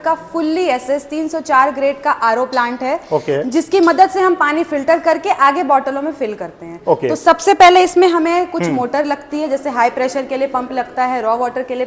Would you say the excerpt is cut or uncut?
uncut